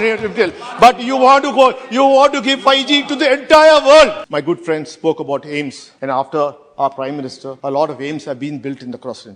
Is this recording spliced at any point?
yes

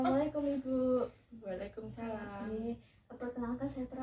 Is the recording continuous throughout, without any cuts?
yes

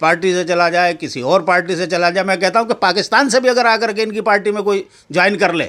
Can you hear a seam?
no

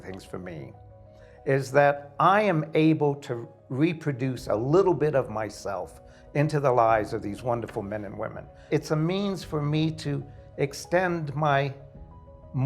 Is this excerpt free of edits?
no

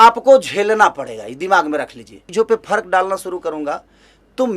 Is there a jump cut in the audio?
yes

